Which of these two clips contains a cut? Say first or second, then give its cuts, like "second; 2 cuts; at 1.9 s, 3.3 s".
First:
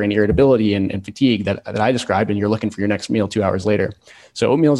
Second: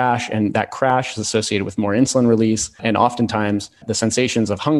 second; 2 cuts; at 2.8 s, 3.9 s